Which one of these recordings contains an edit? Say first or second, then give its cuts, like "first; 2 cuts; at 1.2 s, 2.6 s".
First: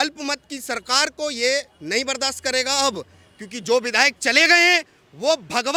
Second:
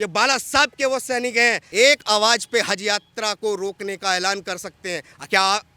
second; 1 cut; at 1.6 s